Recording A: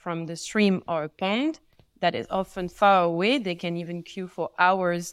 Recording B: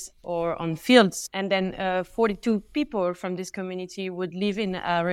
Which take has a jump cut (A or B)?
B